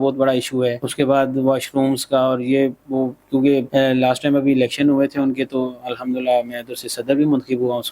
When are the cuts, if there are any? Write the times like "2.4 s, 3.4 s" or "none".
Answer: 0.8 s, 3.7 s